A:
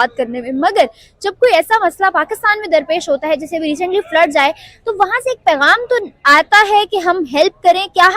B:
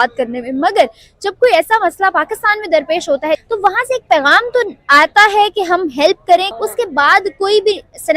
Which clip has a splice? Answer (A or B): B